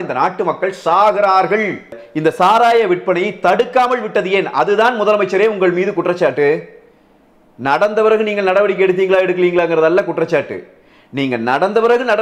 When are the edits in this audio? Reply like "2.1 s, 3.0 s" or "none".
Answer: 2.0 s